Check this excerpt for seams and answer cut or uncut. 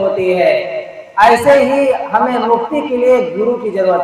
uncut